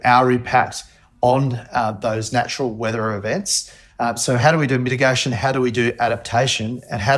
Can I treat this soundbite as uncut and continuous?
yes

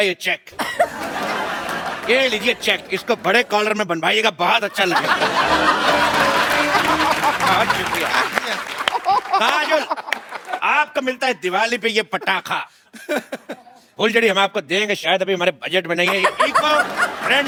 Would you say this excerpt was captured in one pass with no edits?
yes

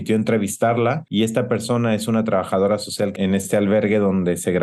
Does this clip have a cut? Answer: no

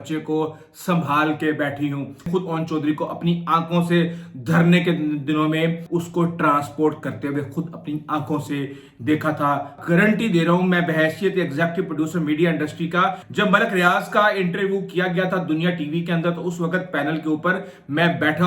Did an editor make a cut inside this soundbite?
yes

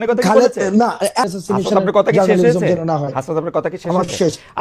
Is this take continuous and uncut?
no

